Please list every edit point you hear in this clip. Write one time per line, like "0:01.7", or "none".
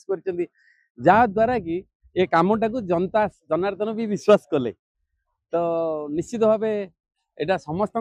none